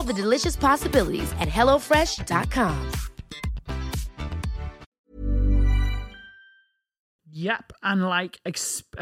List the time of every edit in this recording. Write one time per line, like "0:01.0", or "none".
0:04.9
0:07.1